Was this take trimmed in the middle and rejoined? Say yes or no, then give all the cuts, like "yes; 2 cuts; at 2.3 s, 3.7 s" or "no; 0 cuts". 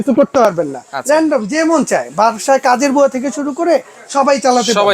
no; 0 cuts